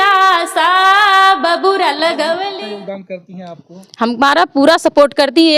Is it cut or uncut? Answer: cut